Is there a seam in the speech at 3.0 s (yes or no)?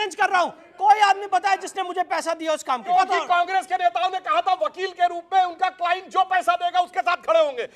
yes